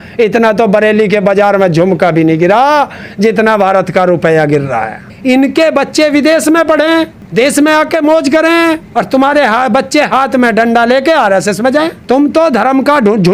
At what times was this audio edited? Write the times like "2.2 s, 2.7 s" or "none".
5.1 s, 7.2 s, 8.8 s, 12.0 s